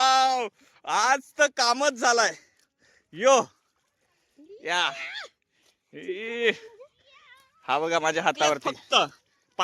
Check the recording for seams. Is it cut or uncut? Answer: cut